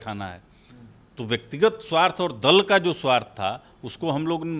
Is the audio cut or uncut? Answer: uncut